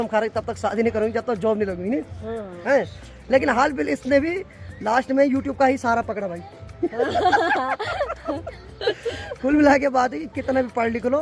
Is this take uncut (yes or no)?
yes